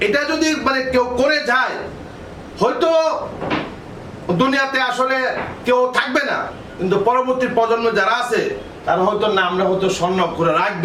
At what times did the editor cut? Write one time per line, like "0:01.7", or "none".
none